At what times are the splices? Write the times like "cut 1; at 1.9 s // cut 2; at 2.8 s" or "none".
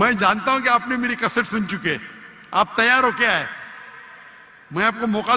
none